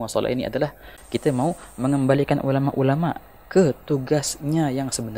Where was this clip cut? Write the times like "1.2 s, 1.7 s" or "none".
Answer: none